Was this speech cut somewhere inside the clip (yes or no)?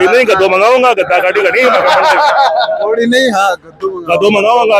no